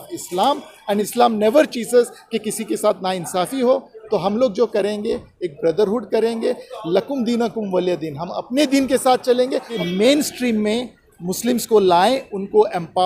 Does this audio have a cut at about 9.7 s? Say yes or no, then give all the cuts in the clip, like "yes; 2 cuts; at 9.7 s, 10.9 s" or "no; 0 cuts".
yes; 2 cuts; at 1.1 s, 9.7 s